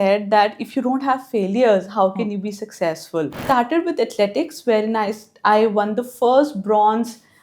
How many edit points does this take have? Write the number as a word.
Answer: one